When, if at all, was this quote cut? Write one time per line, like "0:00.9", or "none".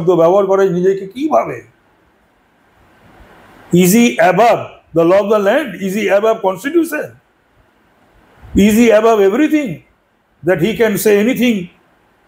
none

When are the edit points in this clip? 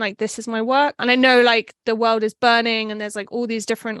0:01.0

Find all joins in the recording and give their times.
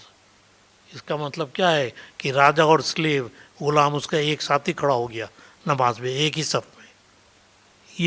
none

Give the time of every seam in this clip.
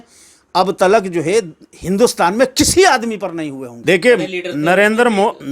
0:03.6

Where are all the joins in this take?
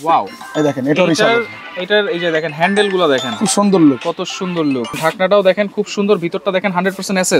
0:04.9

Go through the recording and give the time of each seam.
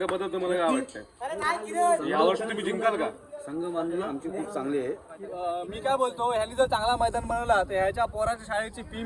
0:05.1

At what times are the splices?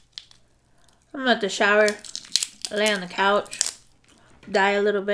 none

